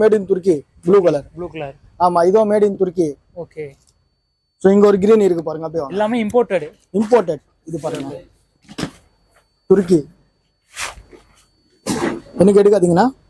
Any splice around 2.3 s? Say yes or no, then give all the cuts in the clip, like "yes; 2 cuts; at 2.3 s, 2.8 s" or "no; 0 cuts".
no; 0 cuts